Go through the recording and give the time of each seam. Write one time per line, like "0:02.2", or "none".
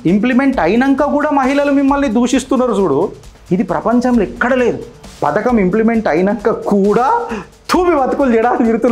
none